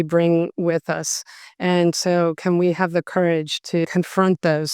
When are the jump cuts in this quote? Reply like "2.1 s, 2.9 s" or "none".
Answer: 3.8 s